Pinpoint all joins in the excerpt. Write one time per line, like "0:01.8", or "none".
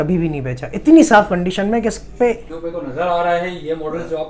0:02.5